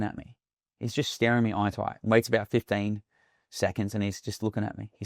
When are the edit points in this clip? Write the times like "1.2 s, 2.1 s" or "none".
none